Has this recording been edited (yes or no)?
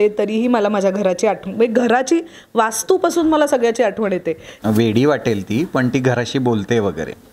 yes